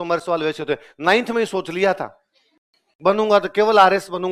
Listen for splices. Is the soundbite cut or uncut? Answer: uncut